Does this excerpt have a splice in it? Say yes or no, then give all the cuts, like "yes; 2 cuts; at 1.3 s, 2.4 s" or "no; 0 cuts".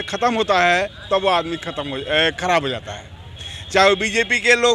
no; 0 cuts